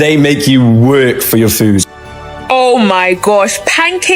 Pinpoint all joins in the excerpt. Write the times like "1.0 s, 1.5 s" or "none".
2.3 s

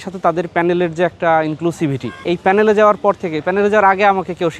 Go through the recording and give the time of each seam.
2.2 s

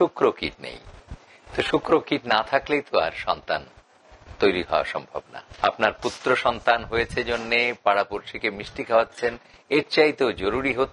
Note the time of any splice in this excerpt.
5.4 s

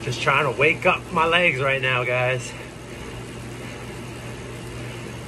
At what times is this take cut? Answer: none

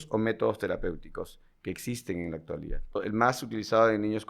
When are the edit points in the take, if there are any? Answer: 3.0 s

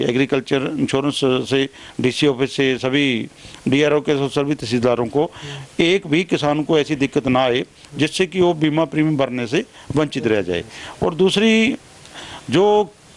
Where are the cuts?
none

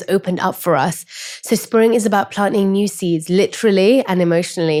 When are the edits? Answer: none

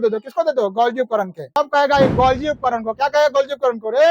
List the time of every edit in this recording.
1.4 s

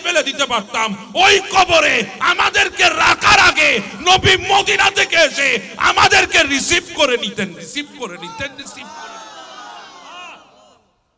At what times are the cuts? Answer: none

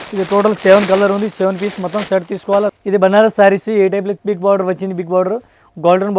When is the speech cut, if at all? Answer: 2.7 s

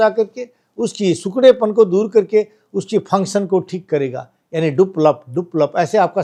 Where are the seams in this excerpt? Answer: none

